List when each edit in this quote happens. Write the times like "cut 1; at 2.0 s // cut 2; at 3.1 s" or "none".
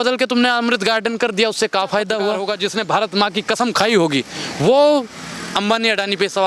cut 1; at 2.4 s